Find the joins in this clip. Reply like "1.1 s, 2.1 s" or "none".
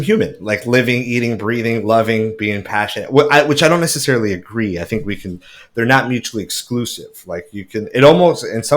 none